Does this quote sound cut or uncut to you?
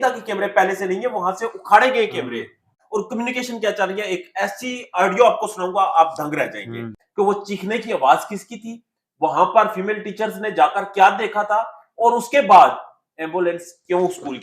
cut